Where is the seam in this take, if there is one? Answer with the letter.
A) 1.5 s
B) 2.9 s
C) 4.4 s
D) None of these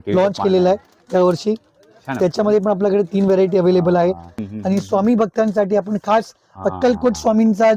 C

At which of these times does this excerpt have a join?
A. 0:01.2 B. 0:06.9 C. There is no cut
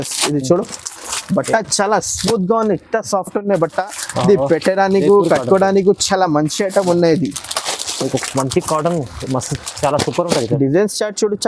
C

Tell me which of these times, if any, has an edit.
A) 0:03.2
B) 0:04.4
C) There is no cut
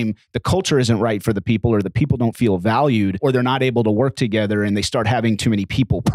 A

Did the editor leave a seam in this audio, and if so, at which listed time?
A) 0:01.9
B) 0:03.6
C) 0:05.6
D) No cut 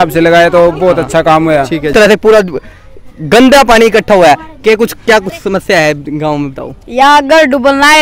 A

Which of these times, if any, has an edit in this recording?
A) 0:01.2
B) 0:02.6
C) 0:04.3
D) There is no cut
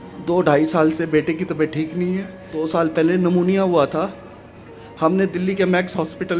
B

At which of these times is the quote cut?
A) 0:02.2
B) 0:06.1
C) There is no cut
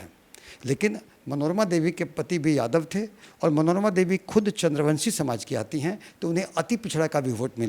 C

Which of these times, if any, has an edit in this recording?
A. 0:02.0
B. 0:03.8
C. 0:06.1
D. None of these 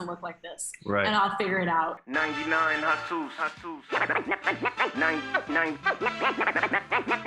A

